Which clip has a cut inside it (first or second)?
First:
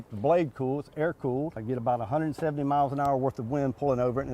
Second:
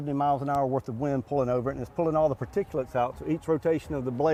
first